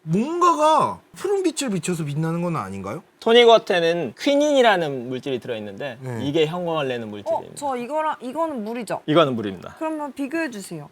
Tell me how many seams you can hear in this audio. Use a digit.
1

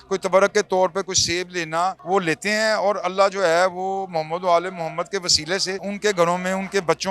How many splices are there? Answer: 2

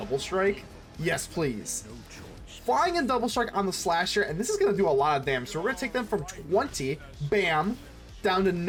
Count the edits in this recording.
0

